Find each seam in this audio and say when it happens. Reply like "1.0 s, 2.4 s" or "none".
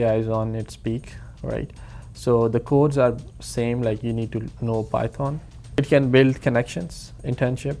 5.5 s